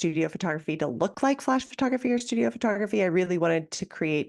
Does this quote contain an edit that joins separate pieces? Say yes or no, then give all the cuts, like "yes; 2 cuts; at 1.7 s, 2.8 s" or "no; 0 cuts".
no; 0 cuts